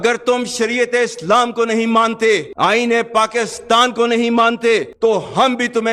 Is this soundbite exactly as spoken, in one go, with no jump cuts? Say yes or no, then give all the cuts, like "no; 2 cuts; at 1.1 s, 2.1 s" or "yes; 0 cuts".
no; 1 cut; at 4.9 s